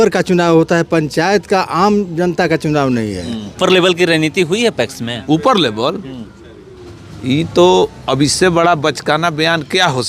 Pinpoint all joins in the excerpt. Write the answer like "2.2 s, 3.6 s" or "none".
3.5 s